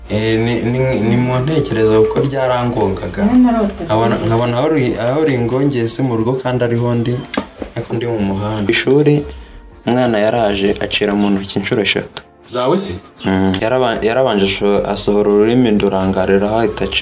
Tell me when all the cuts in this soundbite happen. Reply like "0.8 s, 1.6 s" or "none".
8.7 s, 13.6 s